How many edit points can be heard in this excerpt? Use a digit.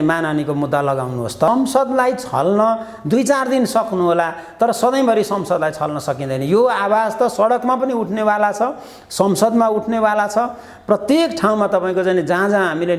1